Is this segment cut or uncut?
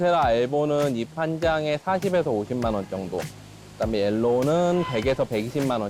uncut